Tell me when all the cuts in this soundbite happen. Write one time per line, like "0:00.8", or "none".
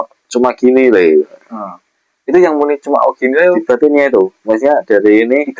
none